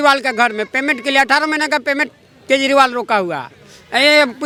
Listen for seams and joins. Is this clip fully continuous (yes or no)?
yes